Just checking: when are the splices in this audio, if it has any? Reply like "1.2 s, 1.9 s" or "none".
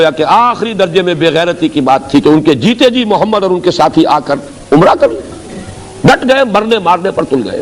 none